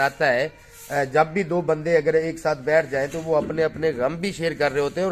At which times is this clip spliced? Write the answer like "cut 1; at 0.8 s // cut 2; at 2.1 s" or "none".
none